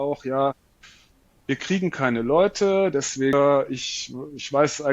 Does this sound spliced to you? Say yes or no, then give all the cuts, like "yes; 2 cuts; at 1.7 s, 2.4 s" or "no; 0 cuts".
yes; 1 cut; at 3.3 s